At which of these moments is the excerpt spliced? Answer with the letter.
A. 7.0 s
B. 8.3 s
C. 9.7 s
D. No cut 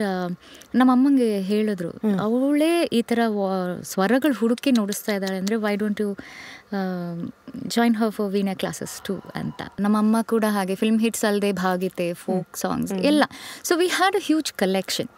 C